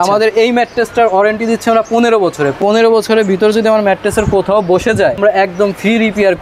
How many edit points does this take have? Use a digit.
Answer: 2